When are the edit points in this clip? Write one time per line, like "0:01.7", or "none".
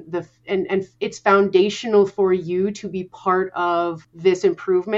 0:04.1